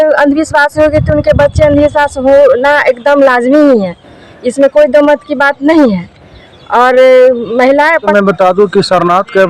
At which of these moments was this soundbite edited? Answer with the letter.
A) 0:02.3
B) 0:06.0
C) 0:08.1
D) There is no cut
C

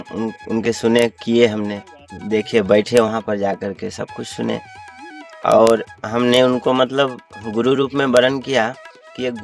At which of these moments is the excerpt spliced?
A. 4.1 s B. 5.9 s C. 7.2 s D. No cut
D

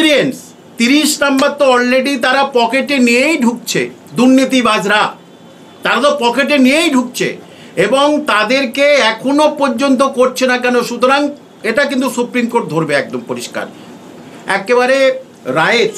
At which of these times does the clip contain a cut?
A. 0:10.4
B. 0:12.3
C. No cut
C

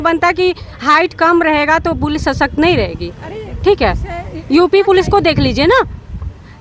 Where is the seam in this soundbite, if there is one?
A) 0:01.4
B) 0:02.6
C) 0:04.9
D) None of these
D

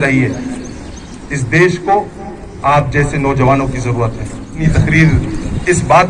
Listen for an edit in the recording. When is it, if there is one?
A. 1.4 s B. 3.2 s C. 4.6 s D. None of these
C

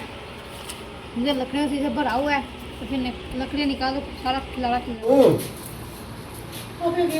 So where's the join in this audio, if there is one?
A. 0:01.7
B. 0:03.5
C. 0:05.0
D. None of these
C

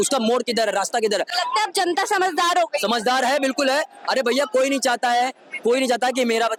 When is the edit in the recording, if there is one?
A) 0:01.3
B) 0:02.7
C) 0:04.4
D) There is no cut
D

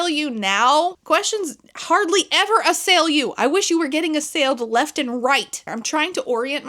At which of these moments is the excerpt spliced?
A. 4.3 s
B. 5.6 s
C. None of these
B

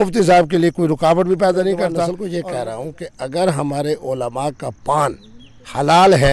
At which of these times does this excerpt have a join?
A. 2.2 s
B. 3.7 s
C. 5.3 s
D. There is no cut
A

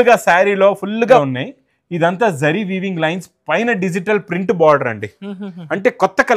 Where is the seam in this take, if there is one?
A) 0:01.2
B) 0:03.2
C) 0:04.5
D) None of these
A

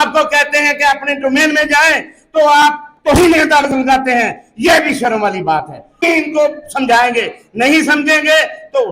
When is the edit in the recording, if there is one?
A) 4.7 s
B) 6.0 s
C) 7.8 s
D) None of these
B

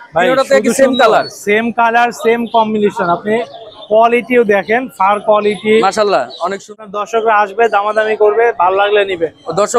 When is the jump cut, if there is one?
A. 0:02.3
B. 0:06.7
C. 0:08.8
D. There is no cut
B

